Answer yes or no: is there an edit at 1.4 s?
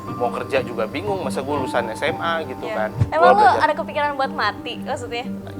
no